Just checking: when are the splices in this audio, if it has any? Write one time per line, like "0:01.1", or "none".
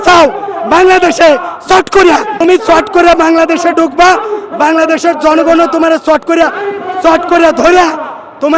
none